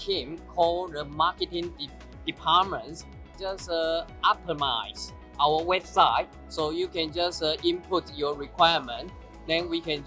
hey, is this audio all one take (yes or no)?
no